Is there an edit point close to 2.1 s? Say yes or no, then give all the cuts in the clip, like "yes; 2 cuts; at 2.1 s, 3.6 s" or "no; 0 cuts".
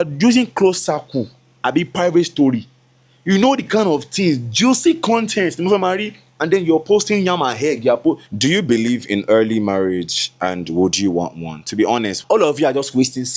no; 2 cuts; at 8.3 s, 12.1 s